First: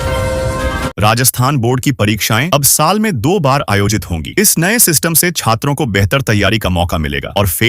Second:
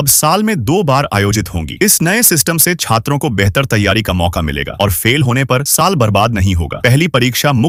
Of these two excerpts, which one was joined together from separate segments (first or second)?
first